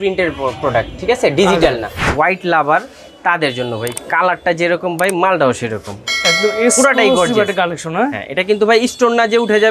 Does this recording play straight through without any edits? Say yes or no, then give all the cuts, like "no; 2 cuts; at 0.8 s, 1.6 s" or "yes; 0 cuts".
no; 2 cuts; at 2.1 s, 3.9 s